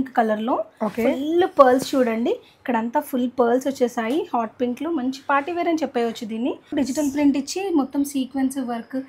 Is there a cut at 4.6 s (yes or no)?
no